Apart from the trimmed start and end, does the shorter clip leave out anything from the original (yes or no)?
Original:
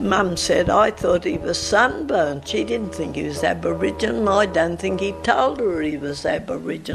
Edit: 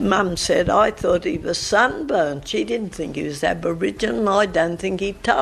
no